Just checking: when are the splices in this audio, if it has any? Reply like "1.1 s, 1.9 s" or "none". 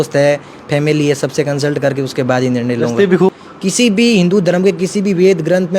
3.3 s